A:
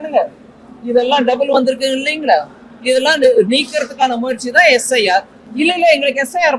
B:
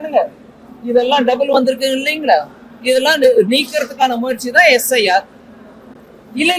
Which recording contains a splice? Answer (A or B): A